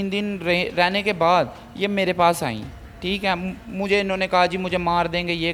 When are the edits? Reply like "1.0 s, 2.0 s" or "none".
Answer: none